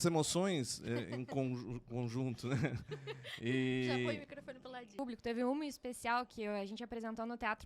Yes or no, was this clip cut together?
yes